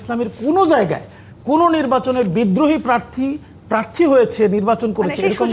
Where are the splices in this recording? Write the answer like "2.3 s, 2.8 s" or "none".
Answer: none